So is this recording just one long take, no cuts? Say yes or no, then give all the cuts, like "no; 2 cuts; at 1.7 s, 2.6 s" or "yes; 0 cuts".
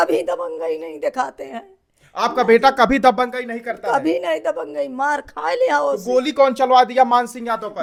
yes; 0 cuts